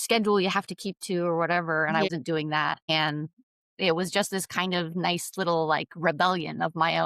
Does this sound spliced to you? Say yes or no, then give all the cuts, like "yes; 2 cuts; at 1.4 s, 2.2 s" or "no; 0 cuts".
yes; 1 cut; at 2.1 s